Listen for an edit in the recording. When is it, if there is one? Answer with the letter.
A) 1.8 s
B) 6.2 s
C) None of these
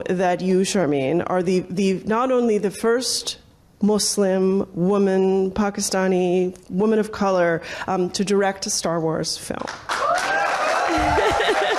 C